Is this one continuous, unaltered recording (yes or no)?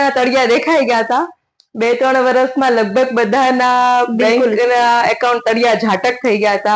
yes